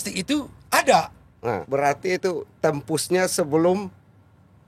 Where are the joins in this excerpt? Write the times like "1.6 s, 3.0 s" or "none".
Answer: 1.6 s

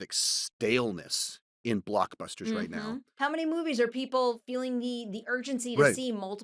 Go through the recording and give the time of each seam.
3.1 s

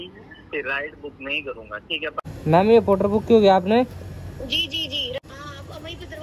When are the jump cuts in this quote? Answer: 2.3 s, 5.2 s

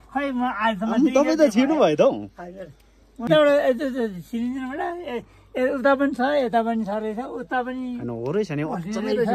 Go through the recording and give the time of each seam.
3.3 s

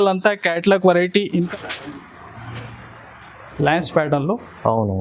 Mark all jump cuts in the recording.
1.5 s

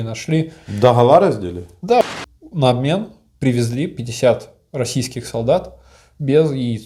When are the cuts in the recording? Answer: 2.0 s

